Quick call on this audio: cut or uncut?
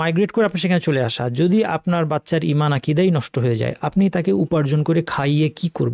uncut